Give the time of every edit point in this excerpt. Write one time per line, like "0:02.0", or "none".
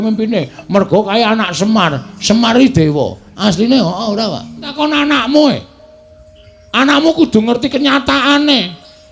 0:04.7